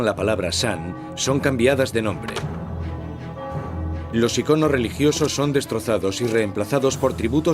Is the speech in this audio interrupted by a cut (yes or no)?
yes